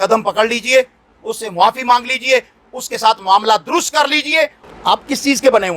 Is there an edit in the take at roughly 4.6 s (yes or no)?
yes